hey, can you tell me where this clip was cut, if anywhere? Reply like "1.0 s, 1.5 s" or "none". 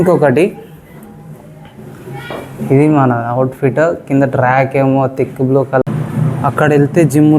5.8 s

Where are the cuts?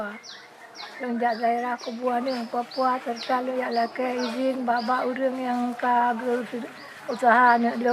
none

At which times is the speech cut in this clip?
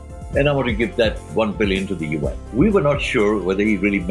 2.4 s

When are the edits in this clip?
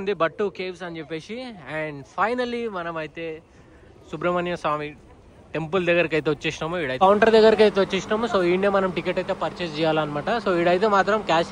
6.9 s

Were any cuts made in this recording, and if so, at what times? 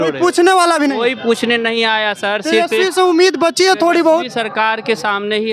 none

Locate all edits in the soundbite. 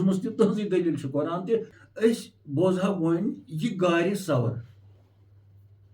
1.7 s

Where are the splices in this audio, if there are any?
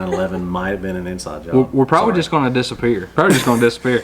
3.1 s

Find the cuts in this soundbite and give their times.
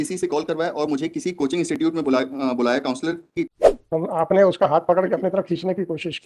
3.5 s

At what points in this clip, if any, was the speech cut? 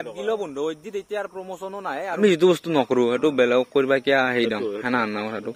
2.1 s

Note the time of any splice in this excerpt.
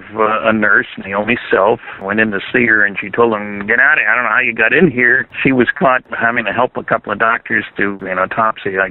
1.9 s, 8.0 s

